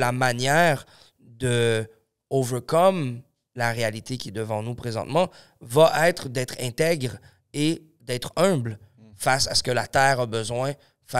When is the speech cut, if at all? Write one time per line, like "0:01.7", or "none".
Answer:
none